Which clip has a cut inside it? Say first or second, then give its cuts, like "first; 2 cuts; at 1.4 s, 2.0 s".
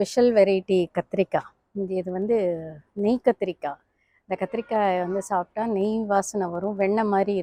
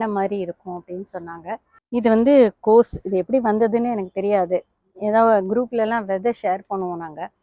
second; 1 cut; at 1.7 s